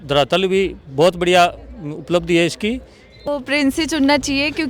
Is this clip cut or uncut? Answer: cut